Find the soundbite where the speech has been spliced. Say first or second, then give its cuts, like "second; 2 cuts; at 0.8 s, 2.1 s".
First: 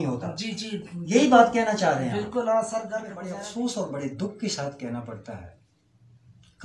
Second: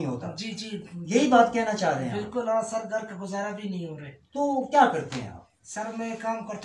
first; 1 cut; at 3.2 s